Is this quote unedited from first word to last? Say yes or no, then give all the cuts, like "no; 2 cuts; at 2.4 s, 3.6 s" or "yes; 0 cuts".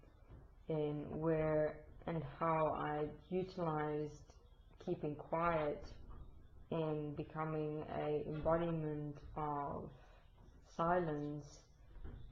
yes; 0 cuts